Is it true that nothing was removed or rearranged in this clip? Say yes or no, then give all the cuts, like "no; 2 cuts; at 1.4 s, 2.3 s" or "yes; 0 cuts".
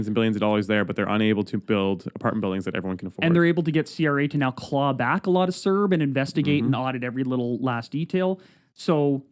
yes; 0 cuts